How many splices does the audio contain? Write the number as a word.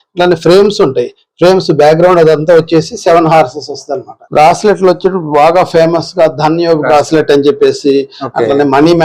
one